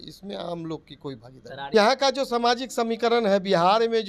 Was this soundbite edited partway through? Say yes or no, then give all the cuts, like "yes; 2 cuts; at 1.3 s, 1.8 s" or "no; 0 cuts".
yes; 1 cut; at 1.7 s